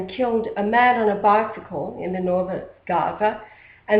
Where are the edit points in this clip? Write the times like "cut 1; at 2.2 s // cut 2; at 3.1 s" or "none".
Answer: cut 1; at 2.5 s